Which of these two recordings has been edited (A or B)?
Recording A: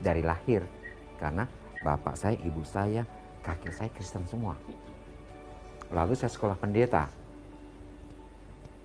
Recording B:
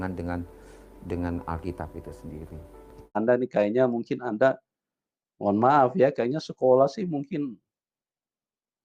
B